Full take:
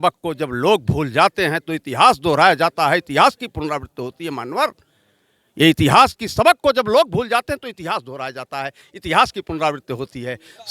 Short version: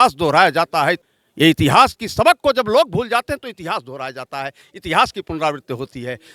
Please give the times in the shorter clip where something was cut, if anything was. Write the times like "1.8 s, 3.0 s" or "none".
1.0 s